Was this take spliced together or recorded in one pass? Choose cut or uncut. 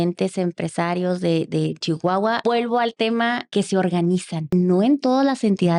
cut